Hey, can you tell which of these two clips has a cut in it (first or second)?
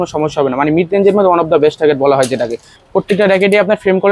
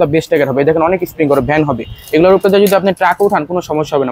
first